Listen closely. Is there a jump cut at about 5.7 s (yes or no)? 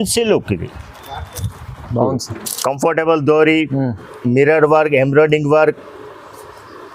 no